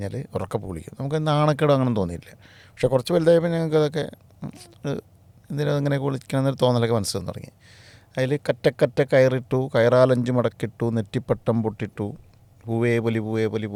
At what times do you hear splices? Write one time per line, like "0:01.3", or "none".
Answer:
none